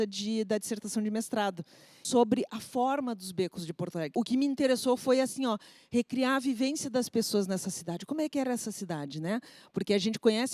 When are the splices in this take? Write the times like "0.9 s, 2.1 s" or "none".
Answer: 2.0 s, 4.1 s

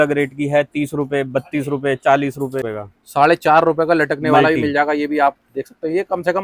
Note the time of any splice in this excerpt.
2.6 s

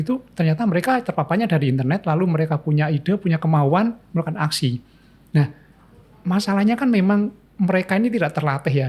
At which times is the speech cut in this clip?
none

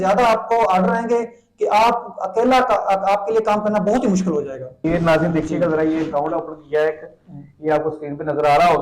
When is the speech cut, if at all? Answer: 4.6 s

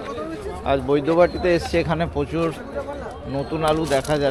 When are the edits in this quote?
none

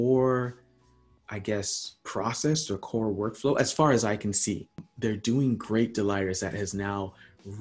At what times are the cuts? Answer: 4.8 s

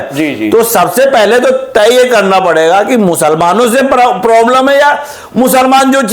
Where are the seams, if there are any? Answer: none

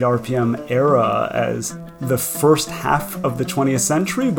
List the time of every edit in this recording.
2.0 s

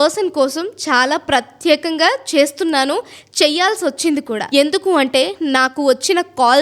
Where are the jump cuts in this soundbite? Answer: 4.4 s

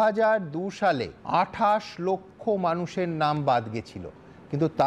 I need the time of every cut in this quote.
1.1 s

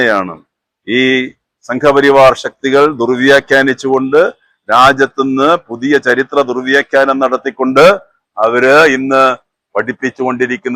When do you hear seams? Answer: none

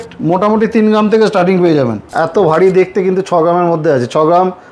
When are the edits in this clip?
2.0 s

